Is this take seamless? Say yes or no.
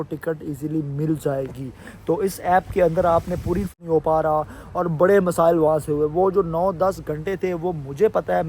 no